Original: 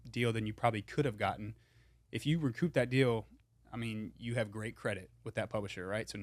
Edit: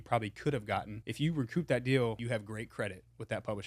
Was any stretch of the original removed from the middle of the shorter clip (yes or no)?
yes